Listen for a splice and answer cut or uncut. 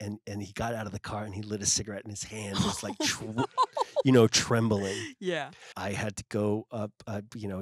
cut